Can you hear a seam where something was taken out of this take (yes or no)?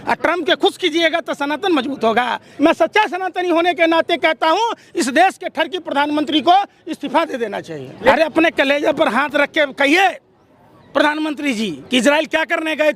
yes